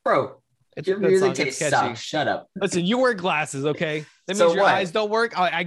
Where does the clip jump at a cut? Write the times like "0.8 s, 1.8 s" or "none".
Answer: 2.5 s